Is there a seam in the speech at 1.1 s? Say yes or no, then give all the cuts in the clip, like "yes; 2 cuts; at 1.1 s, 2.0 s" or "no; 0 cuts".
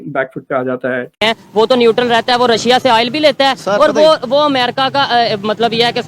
yes; 1 cut; at 1.1 s